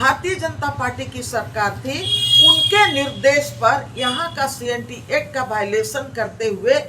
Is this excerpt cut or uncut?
uncut